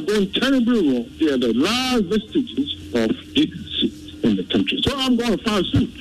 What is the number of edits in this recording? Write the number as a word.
two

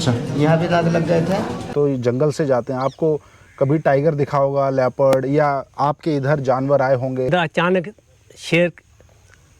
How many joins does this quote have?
two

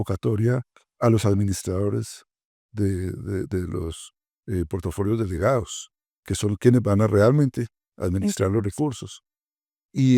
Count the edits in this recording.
zero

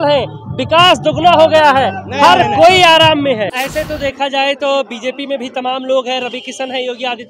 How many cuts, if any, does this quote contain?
one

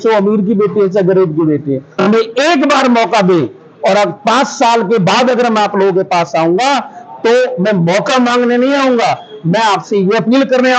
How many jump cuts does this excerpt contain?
one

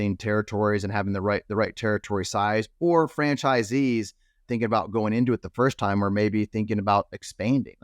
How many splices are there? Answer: one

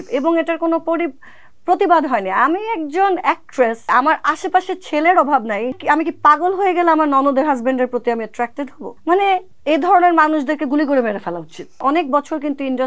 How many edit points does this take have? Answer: five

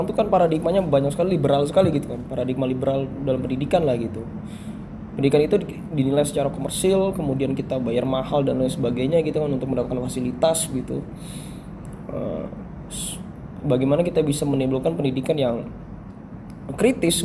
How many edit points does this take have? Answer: zero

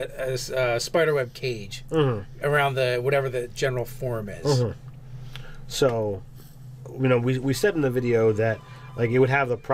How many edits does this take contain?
zero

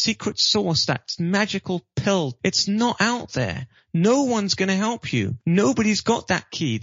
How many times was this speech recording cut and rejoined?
two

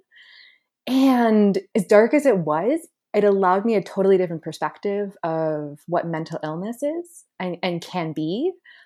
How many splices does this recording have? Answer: one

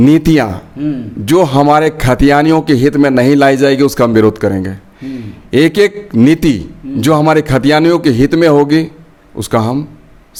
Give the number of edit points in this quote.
zero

